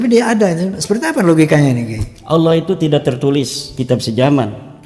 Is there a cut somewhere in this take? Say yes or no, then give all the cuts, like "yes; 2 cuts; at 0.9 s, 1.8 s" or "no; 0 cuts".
no; 0 cuts